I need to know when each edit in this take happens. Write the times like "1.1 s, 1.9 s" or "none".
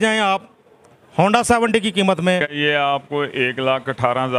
2.5 s